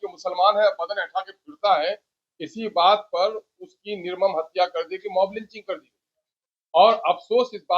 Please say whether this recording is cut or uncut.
uncut